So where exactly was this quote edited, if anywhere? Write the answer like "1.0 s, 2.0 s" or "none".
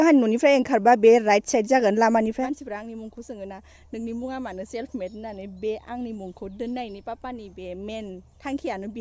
2.4 s

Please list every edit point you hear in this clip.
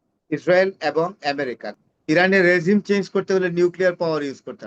1.6 s

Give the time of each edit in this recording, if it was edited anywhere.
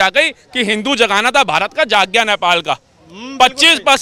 none

